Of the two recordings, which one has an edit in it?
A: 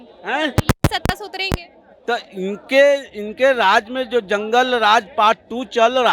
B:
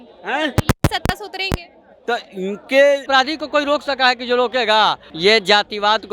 B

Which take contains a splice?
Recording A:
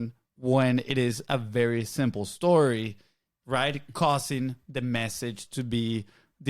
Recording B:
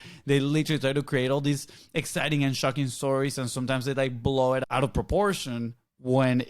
B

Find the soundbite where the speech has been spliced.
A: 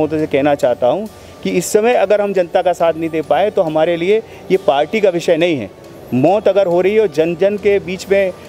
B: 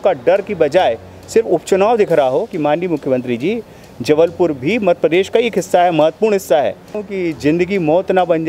B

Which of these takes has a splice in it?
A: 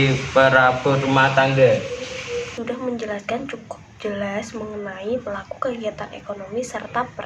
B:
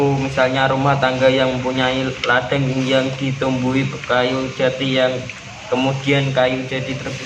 A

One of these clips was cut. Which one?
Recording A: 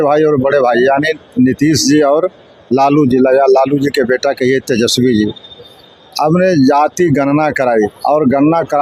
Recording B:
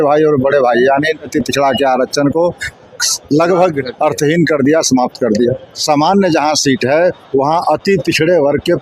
B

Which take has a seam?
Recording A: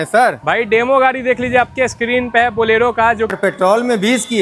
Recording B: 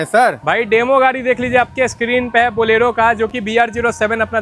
A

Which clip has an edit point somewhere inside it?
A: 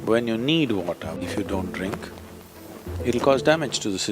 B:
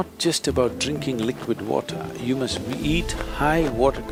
A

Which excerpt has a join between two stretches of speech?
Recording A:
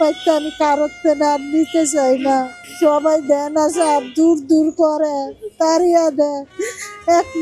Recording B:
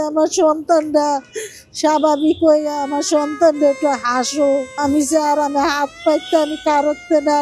B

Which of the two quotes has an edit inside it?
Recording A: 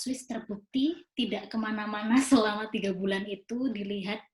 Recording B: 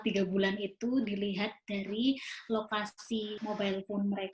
B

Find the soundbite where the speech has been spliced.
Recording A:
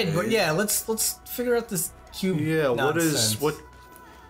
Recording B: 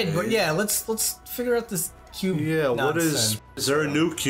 B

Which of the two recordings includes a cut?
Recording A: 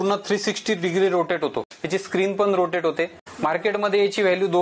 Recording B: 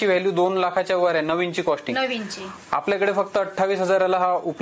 A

